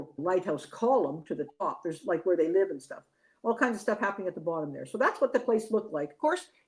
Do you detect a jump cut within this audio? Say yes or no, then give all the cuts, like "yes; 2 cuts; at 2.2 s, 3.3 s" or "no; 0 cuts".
no; 0 cuts